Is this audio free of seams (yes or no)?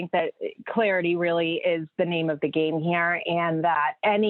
yes